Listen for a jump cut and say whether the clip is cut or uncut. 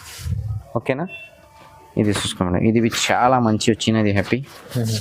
uncut